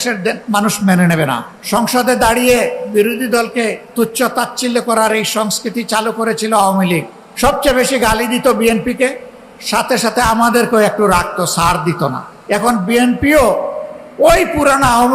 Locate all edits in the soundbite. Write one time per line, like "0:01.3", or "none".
0:01.5
0:03.8
0:07.2
0:12.3